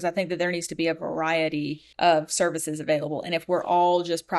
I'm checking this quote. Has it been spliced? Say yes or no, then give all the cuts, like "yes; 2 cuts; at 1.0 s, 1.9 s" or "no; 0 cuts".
yes; 1 cut; at 1.8 s